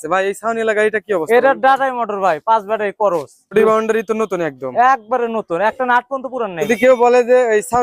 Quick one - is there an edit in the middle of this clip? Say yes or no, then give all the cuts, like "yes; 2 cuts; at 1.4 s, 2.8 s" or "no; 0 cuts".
yes; 2 cuts; at 3.5 s, 6.6 s